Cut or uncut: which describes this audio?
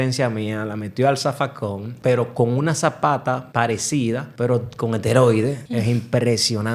cut